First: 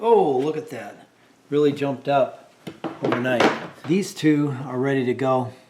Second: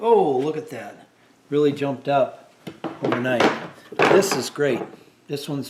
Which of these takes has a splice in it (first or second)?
first